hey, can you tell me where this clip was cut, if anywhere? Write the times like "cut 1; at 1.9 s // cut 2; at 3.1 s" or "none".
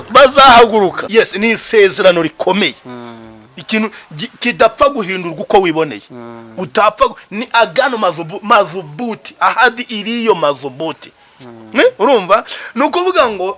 cut 1; at 1.0 s